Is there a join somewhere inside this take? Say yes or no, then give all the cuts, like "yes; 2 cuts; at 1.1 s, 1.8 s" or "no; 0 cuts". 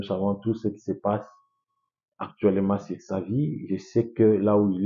no; 0 cuts